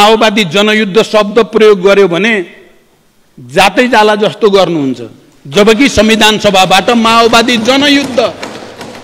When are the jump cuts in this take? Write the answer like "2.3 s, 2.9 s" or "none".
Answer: none